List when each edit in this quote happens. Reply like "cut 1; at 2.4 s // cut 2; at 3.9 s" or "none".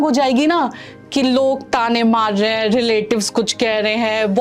none